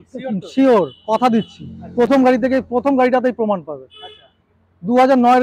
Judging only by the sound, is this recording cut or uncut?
uncut